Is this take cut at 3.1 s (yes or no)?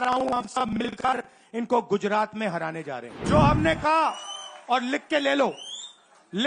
yes